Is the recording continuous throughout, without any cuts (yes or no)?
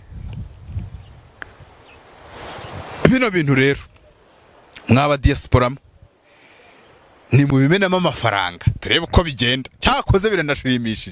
yes